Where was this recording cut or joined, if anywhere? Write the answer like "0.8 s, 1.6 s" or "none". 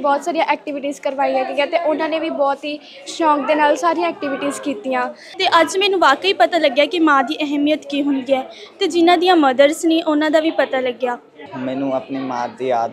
5.2 s, 11.5 s